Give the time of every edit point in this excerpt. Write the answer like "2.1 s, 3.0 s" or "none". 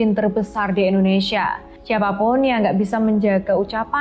1.7 s